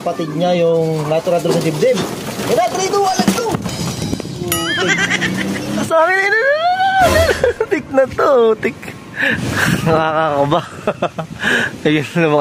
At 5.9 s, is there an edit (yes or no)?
yes